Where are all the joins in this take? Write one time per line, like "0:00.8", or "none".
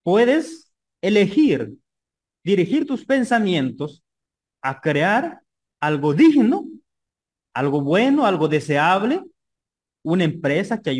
none